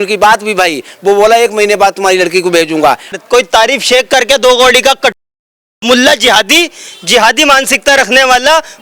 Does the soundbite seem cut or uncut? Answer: cut